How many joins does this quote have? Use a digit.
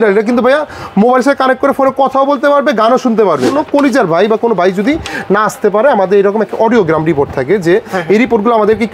1